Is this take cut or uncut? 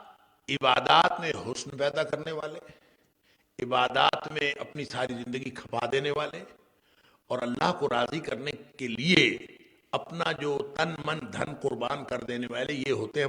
uncut